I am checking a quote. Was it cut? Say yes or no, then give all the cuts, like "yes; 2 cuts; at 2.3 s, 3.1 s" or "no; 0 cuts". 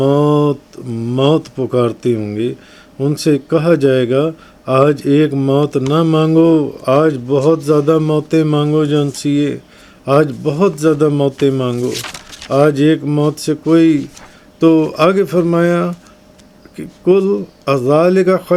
no; 0 cuts